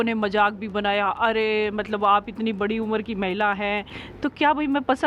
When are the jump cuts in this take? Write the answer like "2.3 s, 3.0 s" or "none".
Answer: 4.0 s